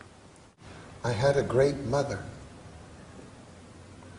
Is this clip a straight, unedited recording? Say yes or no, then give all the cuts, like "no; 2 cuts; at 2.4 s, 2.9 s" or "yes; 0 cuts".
yes; 0 cuts